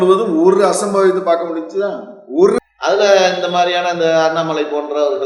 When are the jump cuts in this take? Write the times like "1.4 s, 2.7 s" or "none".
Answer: 2.6 s